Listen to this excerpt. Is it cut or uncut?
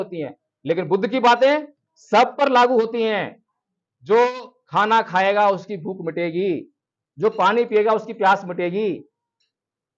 uncut